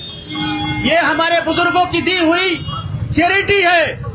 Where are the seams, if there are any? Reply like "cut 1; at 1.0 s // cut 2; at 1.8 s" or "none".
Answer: none